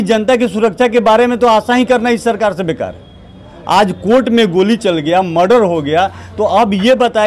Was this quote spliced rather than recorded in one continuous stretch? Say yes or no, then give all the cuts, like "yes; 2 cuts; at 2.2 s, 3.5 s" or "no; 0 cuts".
no; 0 cuts